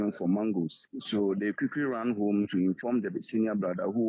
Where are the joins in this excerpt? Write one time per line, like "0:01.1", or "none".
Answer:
none